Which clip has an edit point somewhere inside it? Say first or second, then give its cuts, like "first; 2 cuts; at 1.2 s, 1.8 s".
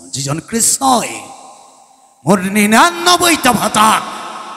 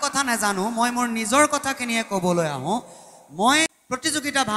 second; 1 cut; at 3.7 s